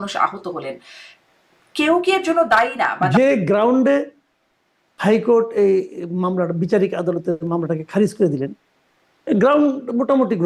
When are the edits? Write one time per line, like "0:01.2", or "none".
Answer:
0:03.1